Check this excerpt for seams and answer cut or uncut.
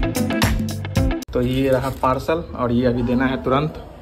cut